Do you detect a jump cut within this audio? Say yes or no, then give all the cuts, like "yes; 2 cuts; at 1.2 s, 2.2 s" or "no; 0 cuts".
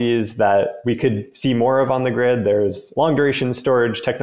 yes; 1 cut; at 2.9 s